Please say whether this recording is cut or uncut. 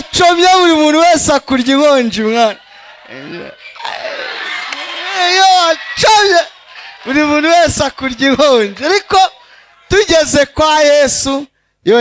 uncut